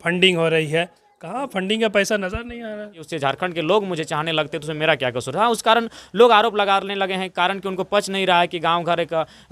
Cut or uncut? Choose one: cut